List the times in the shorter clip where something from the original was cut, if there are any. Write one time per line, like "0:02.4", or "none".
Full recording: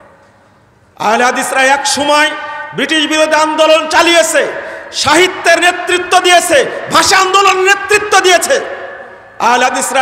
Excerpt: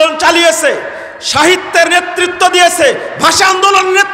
none

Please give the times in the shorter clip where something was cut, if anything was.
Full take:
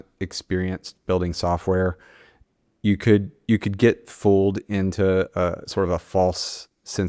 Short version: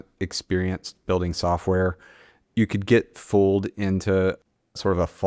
0:02.4

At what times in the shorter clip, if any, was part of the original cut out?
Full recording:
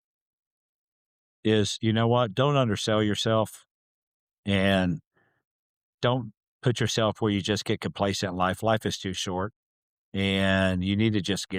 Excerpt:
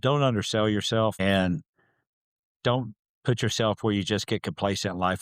0:01.2

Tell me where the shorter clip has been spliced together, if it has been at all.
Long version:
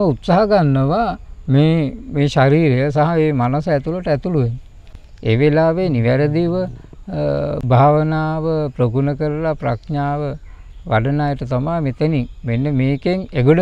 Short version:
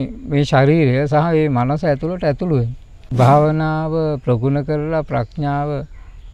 0:03.1

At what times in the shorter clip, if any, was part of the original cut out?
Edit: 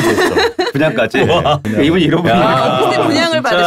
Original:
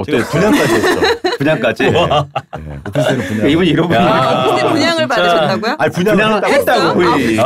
0:01.6

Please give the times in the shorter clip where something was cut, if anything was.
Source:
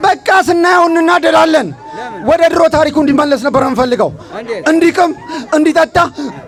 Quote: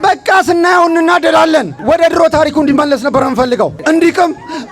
0:01.7
0:03.8

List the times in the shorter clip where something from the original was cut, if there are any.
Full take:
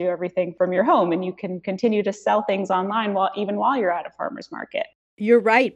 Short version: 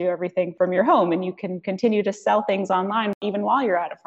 0:03.1

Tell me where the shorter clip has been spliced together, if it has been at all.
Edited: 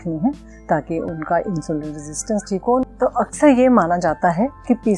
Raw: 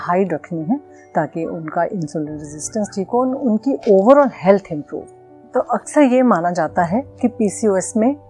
0:02.9

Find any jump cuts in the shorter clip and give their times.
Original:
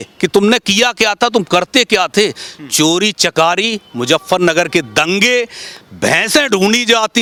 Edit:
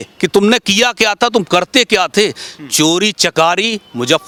none

